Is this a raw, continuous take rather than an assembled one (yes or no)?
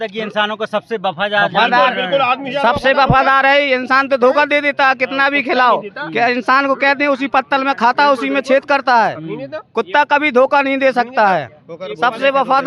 yes